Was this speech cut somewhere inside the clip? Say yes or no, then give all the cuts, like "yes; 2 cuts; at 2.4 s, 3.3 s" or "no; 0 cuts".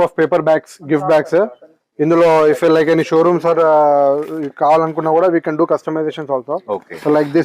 no; 0 cuts